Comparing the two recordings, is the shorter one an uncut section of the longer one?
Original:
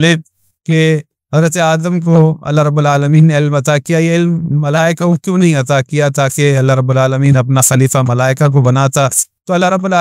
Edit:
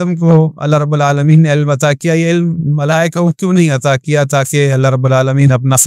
yes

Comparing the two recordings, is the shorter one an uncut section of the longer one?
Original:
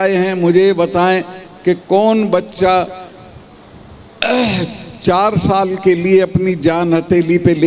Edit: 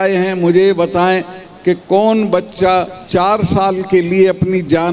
no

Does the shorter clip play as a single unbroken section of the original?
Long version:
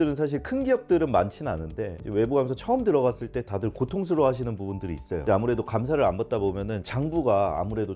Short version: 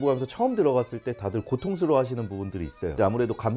yes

